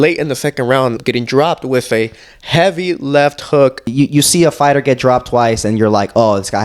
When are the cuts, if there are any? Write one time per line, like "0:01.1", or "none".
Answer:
0:01.0
0:03.9